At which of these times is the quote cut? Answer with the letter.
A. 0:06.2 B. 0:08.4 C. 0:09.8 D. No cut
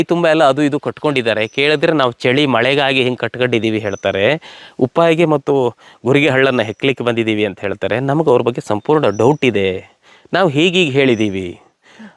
D